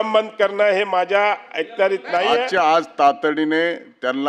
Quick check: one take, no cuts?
no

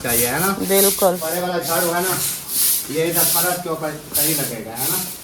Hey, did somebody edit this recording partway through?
yes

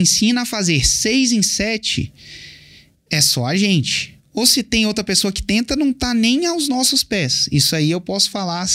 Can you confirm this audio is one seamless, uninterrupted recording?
yes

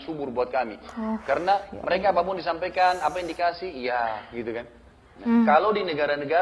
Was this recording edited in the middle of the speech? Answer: yes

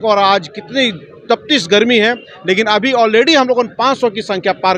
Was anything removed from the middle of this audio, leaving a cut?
no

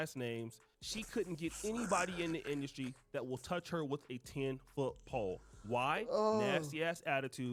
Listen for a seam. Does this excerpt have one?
no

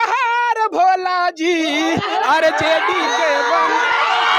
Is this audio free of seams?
yes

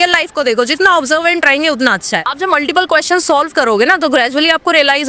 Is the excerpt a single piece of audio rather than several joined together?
no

